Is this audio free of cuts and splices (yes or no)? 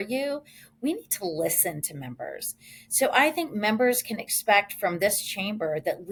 yes